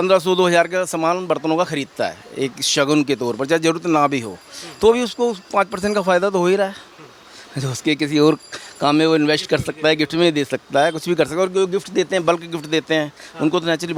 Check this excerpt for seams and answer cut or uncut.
uncut